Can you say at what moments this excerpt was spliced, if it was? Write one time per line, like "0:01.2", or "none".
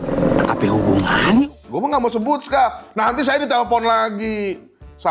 0:01.6